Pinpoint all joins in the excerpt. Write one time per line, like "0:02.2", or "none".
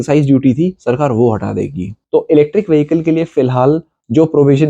0:01.9